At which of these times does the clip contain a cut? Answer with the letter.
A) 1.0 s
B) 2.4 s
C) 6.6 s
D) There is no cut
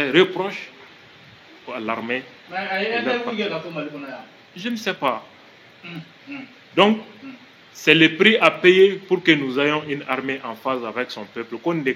D